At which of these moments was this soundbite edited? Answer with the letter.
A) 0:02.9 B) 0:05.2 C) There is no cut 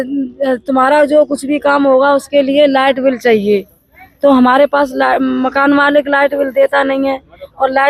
C